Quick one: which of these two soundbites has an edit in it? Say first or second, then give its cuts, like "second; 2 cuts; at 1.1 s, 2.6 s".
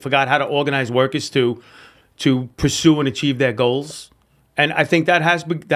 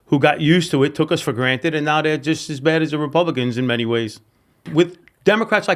second; 1 cut; at 4.7 s